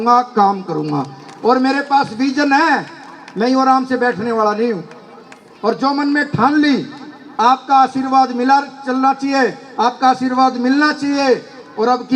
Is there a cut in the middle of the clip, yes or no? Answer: no